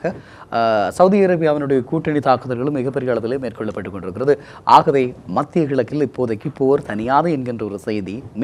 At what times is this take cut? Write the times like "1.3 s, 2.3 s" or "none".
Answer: none